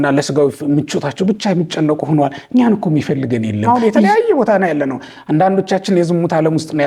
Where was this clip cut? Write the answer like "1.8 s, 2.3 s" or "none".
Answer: 3.7 s